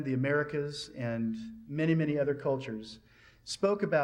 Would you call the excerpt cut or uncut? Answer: uncut